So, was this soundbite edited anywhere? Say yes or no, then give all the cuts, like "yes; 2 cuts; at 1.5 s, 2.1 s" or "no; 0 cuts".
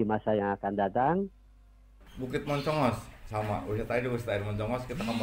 yes; 1 cut; at 1.7 s